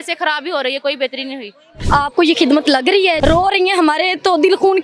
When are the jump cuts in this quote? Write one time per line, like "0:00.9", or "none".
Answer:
0:03.2